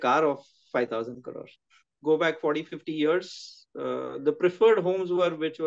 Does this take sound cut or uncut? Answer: cut